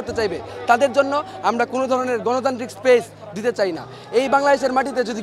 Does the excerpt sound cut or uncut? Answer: uncut